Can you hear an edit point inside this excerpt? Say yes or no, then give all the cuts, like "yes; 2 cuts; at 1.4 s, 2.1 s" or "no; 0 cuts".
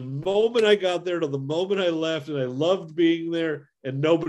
no; 0 cuts